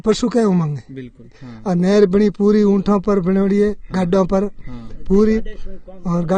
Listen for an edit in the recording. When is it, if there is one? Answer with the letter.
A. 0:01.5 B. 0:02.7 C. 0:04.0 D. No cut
A